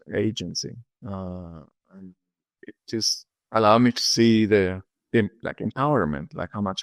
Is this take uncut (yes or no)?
yes